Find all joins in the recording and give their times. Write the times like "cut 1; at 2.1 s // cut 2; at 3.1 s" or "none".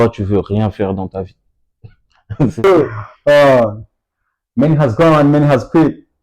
cut 1; at 2.7 s